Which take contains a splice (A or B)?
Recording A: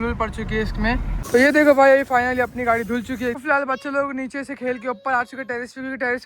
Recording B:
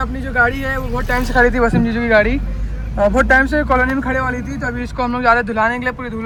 A